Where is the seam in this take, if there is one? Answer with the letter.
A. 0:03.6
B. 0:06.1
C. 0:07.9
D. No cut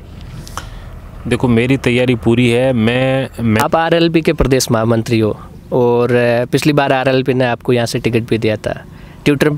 A